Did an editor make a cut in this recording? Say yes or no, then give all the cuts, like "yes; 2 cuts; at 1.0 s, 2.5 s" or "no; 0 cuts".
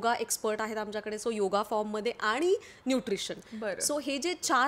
no; 0 cuts